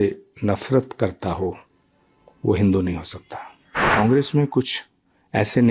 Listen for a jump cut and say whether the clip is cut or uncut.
cut